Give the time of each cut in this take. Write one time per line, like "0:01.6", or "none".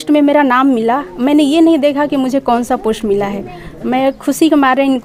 none